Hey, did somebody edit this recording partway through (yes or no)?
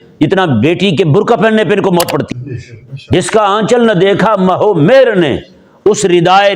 yes